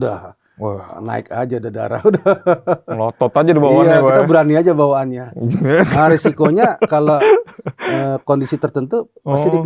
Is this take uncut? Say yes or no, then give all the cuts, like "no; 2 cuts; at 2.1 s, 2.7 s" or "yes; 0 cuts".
yes; 0 cuts